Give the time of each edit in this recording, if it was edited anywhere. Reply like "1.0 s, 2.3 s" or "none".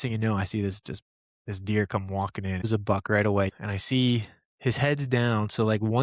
2.7 s, 3.6 s